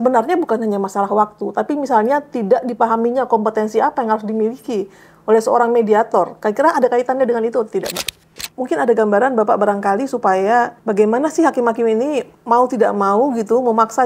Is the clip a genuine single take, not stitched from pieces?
no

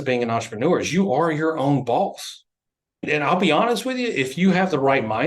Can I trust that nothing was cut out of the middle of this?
no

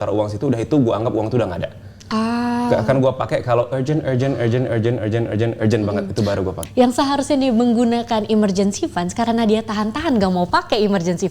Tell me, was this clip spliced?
yes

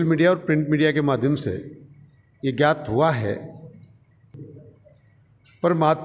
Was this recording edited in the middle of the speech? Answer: yes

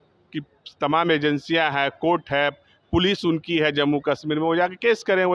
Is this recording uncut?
yes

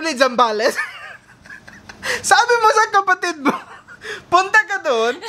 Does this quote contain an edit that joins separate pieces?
no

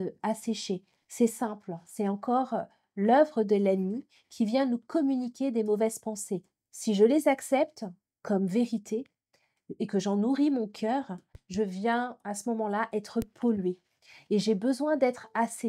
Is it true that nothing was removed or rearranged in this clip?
yes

